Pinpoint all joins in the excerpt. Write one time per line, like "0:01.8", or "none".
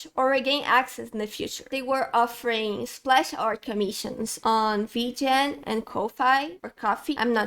0:01.7